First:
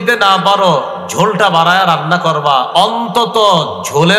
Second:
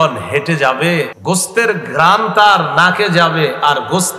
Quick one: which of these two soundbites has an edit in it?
second; 1 cut; at 1.1 s

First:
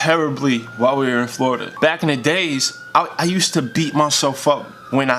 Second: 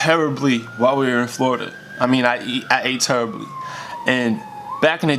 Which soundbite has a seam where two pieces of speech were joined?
first; 1 cut; at 1.7 s

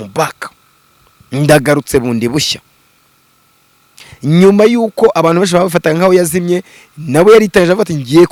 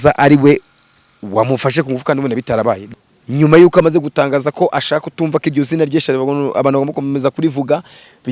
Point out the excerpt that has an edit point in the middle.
second; 1 cut; at 2.8 s

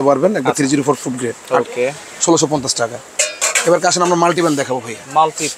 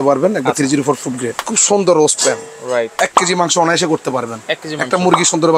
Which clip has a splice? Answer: second; 2 cuts; at 1.4 s, 2.9 s

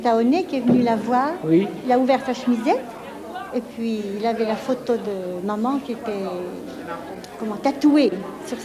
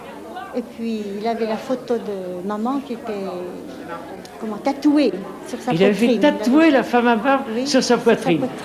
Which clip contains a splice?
first; 1 cut; at 1.8 s

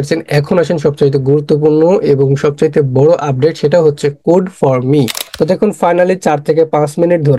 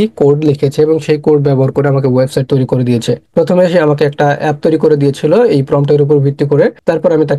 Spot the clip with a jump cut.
first; 1 cut; at 5.2 s

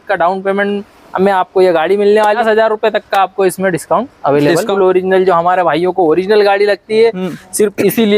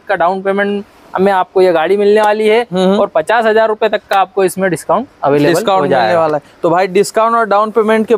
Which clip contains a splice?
first; 2 cuts; at 2.4 s, 4.7 s

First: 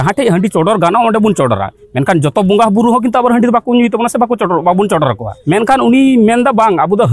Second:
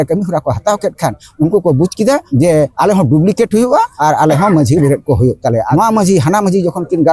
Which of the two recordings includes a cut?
second; 3 cuts; at 2.5 s, 3.9 s, 5.6 s

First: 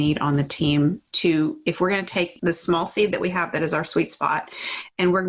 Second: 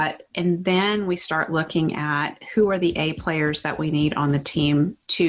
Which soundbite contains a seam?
first; 1 cut; at 2.3 s

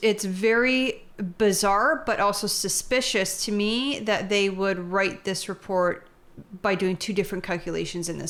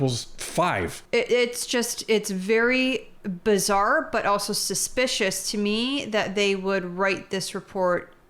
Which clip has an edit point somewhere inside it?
second; 1 cut; at 1.0 s

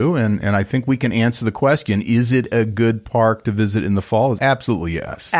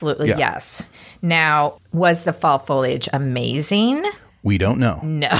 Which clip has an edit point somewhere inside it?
first; 1 cut; at 4.4 s

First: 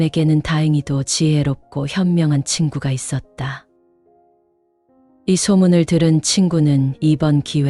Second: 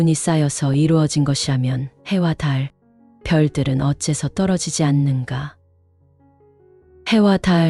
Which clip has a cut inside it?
first; 2 cuts; at 3.7 s, 5.2 s

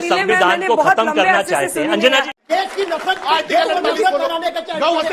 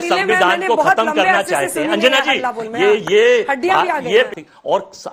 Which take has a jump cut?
first; 1 cut; at 2.4 s

